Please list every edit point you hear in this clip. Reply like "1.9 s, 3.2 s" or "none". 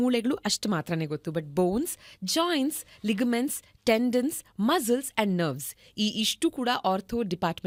none

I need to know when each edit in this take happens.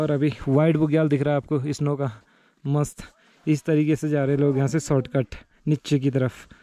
none

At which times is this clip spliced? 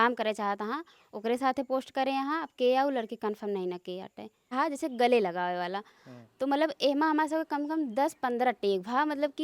4.5 s

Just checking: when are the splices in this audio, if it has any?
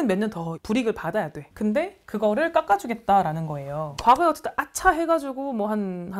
3.9 s

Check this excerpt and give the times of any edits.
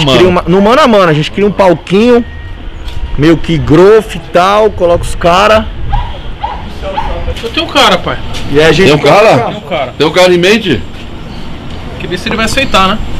7.3 s

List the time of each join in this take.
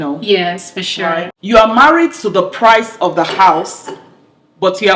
1.3 s

